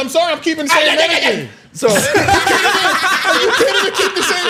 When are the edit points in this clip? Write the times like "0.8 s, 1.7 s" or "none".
none